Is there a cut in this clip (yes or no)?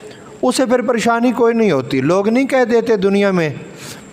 no